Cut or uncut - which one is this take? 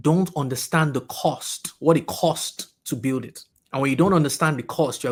uncut